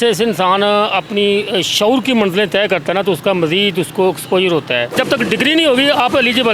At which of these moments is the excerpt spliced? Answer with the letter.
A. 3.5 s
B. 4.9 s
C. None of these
B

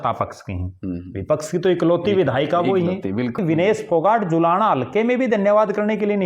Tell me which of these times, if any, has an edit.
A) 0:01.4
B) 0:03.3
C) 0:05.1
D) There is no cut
B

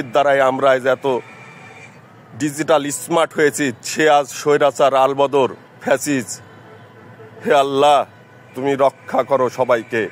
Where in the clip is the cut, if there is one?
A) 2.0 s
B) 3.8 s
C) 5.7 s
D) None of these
D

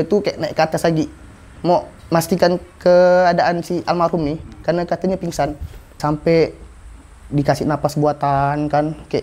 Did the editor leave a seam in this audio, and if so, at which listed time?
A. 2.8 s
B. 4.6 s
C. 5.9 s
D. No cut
C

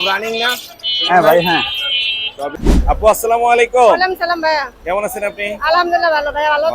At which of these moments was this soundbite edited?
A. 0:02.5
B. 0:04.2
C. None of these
A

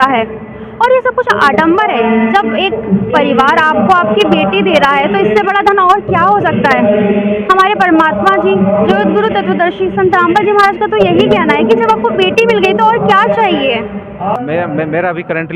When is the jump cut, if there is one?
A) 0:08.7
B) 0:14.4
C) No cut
B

